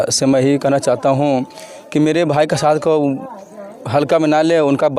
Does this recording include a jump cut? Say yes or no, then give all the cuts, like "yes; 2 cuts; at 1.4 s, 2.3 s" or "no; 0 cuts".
no; 0 cuts